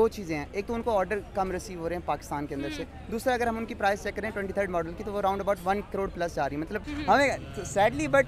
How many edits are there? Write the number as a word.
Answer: one